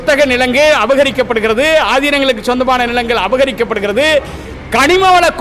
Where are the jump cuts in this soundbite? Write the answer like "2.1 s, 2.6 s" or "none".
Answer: none